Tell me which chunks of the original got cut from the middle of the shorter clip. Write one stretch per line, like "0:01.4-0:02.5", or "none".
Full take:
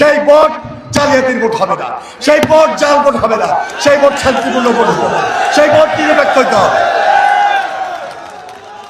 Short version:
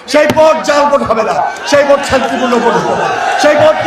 none